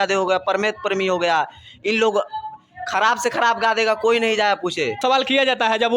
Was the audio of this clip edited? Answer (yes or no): yes